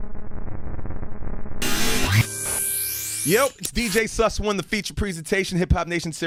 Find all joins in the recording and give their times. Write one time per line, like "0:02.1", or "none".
none